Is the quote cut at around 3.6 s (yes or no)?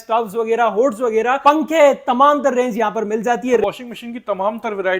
yes